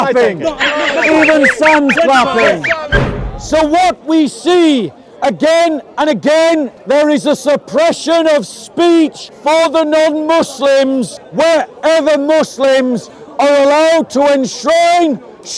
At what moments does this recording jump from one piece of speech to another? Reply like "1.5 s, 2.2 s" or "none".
3.0 s, 6.8 s, 9.3 s, 11.2 s

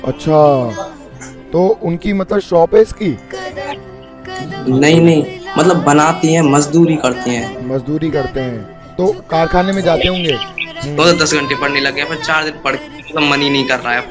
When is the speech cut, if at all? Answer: 10.8 s

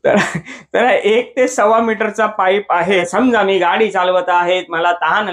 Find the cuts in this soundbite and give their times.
2.8 s

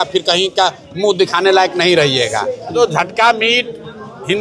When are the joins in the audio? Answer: 2.8 s

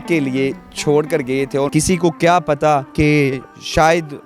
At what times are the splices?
1.7 s, 2.9 s

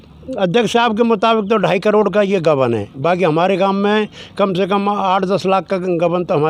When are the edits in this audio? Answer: none

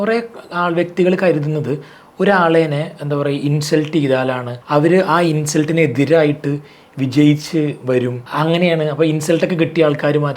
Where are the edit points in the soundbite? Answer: 4.5 s, 8.2 s

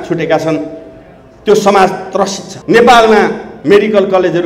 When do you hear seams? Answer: 2.5 s

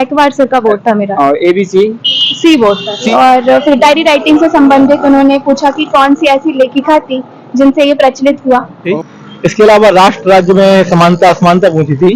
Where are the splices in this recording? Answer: 3.1 s, 8.9 s, 10.1 s

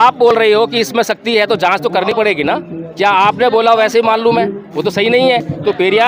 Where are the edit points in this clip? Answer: none

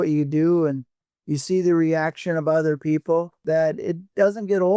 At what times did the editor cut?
3.3 s

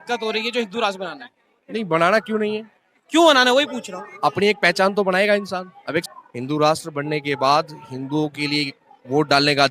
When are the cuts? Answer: 6.1 s

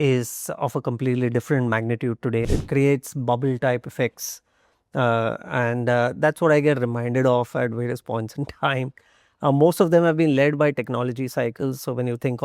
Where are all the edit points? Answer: 2.5 s

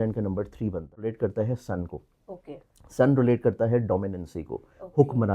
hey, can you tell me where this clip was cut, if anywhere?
1.1 s

